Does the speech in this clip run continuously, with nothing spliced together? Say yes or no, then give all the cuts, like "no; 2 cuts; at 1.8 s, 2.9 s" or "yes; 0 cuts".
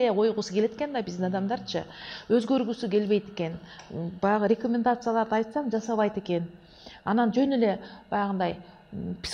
yes; 0 cuts